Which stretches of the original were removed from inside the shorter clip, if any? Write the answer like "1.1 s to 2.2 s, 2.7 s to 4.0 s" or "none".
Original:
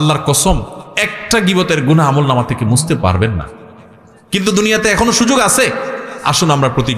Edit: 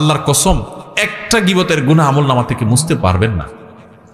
none